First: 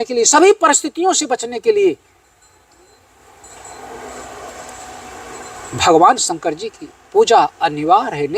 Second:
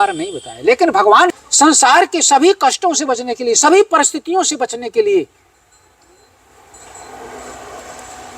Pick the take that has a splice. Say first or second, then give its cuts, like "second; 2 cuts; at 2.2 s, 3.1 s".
second; 1 cut; at 1.4 s